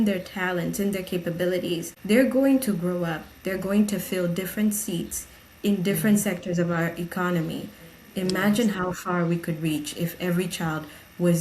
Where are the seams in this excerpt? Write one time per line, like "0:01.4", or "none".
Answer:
0:01.9